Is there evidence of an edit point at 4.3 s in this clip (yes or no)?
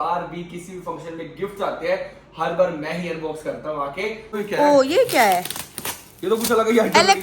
yes